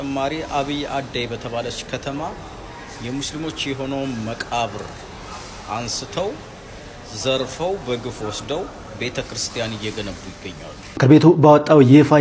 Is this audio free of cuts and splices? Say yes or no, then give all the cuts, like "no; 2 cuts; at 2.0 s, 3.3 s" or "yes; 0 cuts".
no; 1 cut; at 10.9 s